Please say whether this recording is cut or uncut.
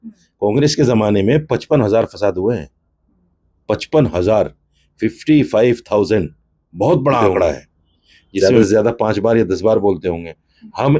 cut